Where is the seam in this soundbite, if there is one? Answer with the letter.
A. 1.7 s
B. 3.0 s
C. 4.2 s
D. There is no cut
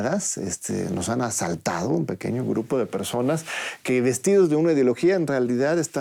D